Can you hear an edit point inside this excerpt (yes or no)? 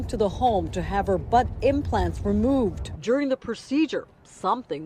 no